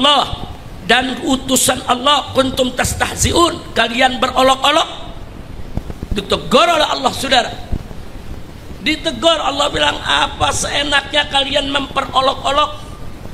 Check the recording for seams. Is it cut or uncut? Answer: uncut